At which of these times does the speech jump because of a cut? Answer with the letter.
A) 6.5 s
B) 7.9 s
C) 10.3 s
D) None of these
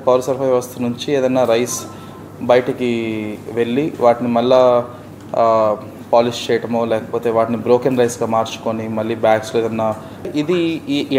C